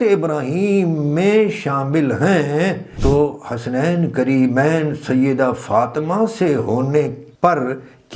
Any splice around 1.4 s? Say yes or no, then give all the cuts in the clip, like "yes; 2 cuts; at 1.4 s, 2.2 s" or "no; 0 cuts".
no; 2 cuts; at 2.9 s, 7.2 s